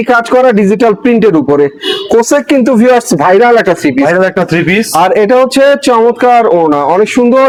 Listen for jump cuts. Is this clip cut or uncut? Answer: uncut